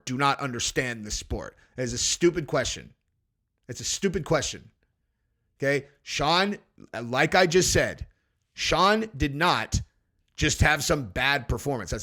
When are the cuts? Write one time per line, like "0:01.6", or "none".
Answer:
none